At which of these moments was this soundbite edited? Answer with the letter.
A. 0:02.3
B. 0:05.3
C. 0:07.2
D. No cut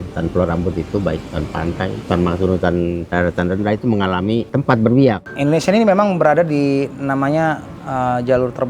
B